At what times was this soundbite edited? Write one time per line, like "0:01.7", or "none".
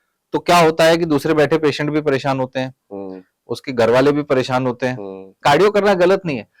0:05.4